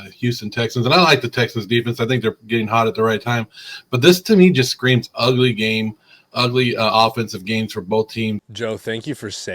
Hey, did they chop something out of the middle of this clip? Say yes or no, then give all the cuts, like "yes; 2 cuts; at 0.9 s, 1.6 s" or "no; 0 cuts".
yes; 1 cut; at 8.4 s